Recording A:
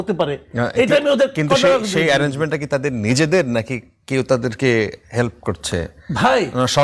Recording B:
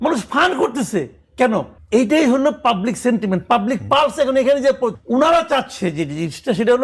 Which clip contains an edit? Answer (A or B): B